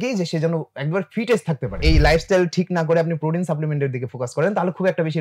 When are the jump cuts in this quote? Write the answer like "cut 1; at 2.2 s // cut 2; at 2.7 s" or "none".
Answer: cut 1; at 1.8 s